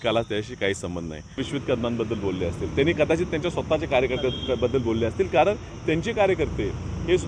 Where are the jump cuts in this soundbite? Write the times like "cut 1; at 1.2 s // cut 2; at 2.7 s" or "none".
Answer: cut 1; at 1.4 s